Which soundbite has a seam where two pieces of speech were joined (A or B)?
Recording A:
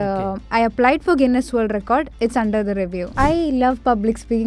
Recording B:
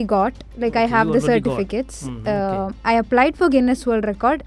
A